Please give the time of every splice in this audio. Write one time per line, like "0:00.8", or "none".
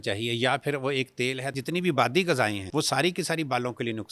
0:01.5
0:02.6